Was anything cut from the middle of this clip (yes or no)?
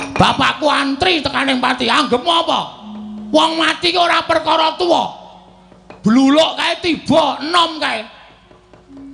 no